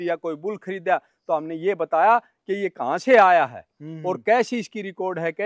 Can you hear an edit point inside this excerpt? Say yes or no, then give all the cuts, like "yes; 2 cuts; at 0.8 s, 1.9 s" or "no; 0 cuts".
no; 0 cuts